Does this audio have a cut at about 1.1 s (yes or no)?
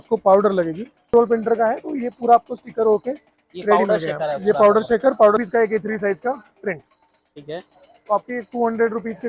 yes